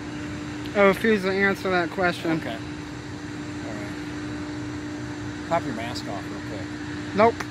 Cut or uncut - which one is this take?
uncut